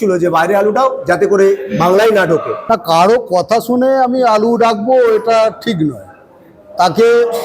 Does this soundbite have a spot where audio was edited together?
yes; 1 cut; at 2.6 s

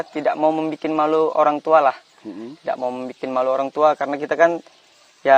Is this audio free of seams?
yes; 0 cuts

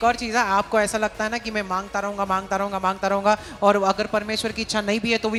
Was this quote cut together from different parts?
no; 0 cuts

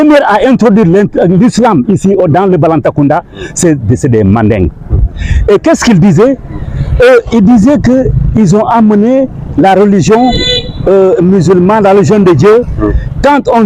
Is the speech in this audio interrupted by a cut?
no; 0 cuts

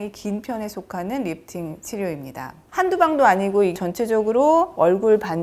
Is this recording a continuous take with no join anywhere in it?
no; 1 cut; at 2.7 s

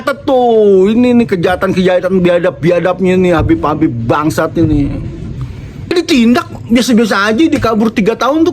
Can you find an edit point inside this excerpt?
yes; 1 cut; at 5.8 s

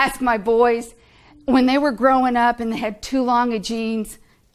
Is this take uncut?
yes; 0 cuts

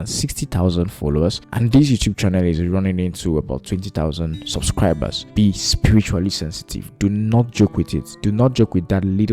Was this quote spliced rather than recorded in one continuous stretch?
no; 0 cuts

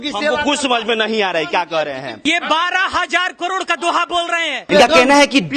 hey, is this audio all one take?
no; 2 cuts; at 2.1 s, 4.6 s

